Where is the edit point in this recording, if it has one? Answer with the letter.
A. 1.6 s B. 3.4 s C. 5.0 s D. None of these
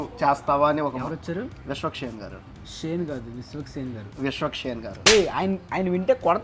C